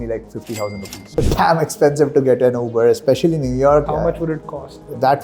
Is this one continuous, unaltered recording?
no; 2 cuts; at 1.2 s, 3.8 s

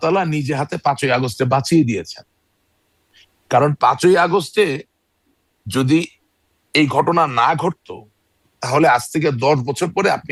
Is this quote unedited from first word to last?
yes; 0 cuts

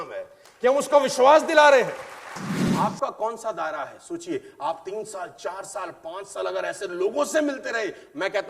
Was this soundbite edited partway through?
yes; 1 cut; at 2.6 s

